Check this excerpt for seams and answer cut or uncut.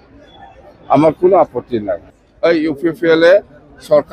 cut